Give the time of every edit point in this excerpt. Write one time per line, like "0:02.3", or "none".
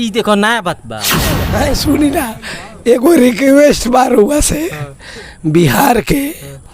0:01.4